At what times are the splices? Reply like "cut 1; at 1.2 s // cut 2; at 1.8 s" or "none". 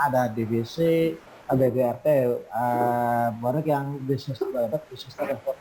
none